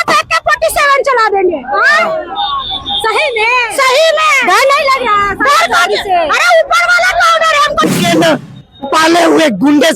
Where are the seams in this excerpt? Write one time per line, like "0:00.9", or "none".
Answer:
0:07.9